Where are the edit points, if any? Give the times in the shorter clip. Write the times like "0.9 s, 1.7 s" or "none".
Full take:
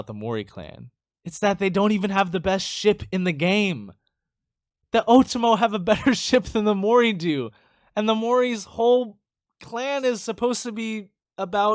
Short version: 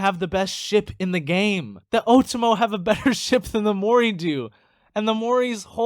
1.7 s